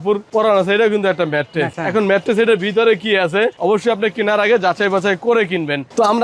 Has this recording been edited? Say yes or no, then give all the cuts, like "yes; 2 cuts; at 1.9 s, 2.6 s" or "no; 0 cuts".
no; 0 cuts